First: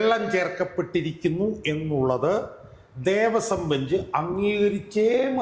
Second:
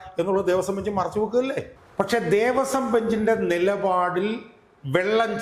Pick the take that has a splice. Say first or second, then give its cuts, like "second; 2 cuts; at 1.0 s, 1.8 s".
second; 1 cut; at 1.8 s